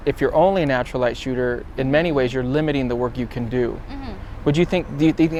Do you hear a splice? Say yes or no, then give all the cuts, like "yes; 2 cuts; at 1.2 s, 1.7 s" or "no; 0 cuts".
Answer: no; 0 cuts